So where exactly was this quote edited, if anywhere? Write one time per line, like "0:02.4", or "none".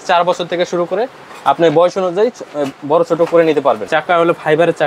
0:03.9